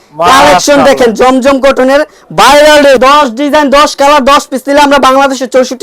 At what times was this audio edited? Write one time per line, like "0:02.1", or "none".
0:03.0

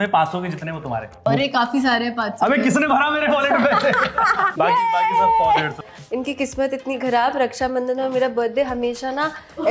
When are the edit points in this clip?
0:01.1
0:04.5
0:05.9

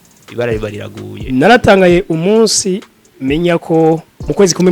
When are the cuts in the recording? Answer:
0:01.2

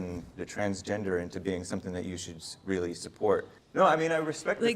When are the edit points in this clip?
0:03.6

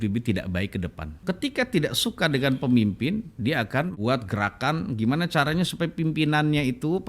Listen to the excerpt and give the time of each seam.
0:01.2
0:04.0

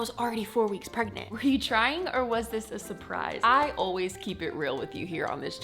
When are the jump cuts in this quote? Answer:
0:01.2
0:03.3

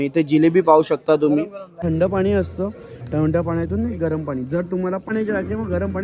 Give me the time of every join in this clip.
0:01.7
0:05.1

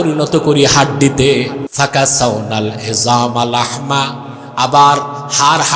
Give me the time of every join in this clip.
0:01.6

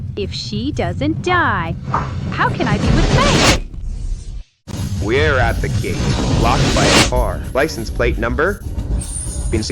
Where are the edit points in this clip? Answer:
0:04.7

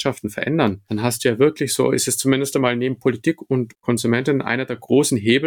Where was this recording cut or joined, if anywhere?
none

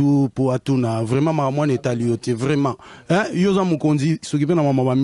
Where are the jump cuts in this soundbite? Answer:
none

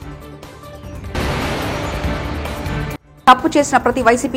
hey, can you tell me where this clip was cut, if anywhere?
0:01.1
0:03.0

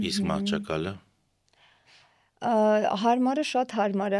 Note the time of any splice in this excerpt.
none

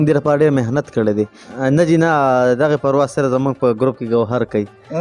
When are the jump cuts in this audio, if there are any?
0:01.4

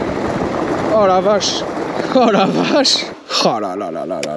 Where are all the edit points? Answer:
0:03.1

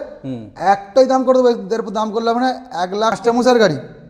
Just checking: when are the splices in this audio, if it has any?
0:03.2

